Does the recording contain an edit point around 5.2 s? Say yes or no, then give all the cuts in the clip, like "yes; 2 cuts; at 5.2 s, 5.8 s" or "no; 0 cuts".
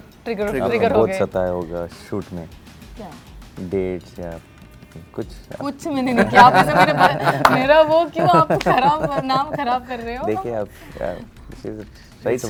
no; 0 cuts